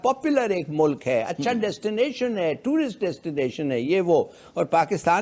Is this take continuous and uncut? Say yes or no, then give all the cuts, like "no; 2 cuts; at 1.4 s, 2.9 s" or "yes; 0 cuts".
yes; 0 cuts